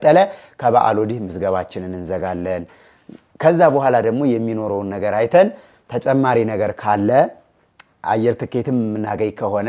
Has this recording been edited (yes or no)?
no